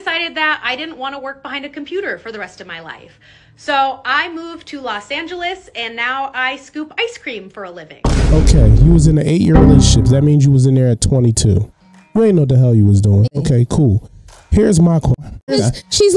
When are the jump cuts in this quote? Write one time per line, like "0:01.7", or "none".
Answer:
0:08.2